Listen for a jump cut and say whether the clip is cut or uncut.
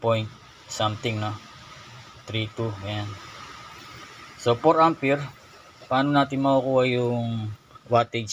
uncut